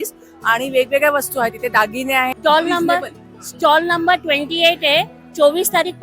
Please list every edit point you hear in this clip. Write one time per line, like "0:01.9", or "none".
0:02.3